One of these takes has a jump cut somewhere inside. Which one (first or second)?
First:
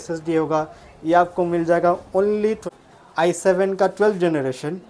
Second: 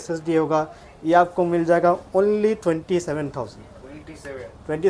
first